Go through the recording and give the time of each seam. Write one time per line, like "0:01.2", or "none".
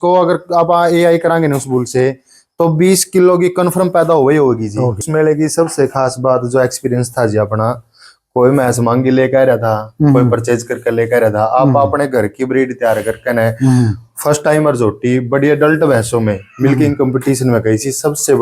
0:05.0